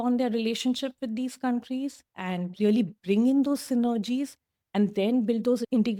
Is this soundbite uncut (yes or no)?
yes